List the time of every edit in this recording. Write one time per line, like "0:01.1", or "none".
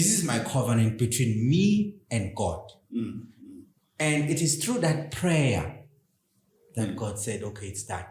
none